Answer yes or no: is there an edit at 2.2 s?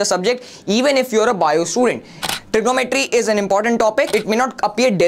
yes